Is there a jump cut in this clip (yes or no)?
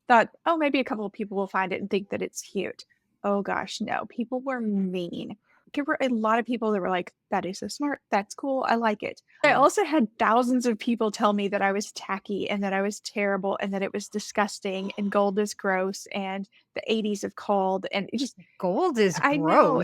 yes